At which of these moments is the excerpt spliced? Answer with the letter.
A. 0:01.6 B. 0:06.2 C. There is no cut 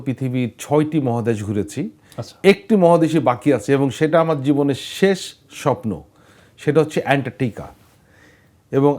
C